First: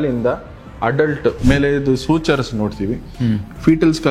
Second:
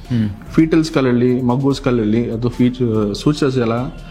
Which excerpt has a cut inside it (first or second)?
first